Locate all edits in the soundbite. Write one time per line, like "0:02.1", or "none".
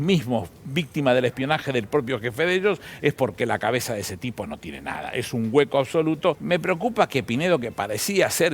0:06.4